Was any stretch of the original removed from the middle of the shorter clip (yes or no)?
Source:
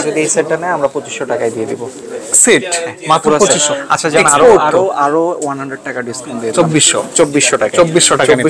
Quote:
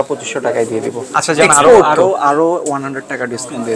yes